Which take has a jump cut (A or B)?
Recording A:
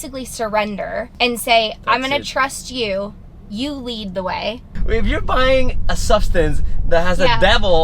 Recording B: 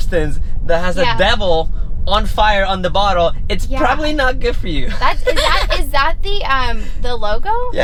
A